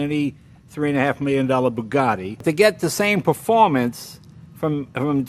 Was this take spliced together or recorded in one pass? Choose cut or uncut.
cut